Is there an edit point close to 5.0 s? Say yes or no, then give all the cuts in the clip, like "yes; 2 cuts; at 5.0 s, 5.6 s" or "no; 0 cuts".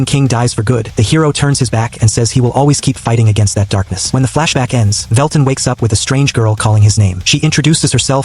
yes; 4 cuts; at 0.9 s, 4.0 s, 5.0 s, 7.2 s